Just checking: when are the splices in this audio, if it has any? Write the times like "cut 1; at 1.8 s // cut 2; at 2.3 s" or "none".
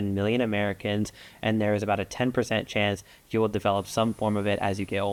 none